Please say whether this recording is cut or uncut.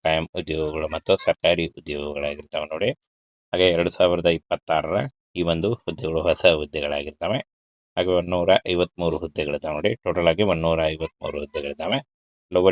uncut